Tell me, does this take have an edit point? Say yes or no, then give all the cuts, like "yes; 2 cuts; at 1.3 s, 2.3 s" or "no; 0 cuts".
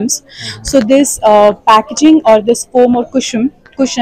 no; 0 cuts